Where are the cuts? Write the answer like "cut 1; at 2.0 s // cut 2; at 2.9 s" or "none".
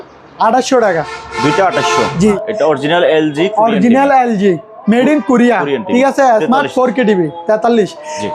cut 1; at 2.3 s